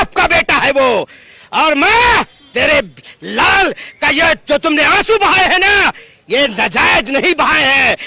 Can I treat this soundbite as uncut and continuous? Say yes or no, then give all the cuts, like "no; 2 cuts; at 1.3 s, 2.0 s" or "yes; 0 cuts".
yes; 0 cuts